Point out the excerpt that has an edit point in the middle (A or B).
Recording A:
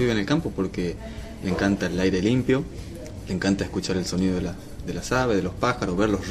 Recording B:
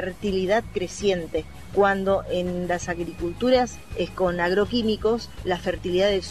B